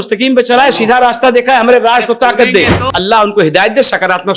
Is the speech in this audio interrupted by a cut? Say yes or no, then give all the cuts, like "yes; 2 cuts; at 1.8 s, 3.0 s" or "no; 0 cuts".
yes; 1 cut; at 2.8 s